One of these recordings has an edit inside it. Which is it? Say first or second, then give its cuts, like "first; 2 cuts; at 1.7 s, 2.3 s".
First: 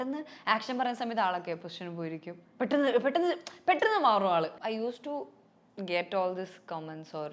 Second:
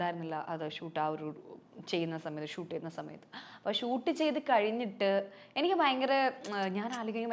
first; 1 cut; at 4.6 s